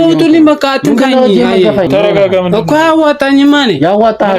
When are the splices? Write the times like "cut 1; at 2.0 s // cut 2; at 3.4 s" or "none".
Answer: cut 1; at 1.8 s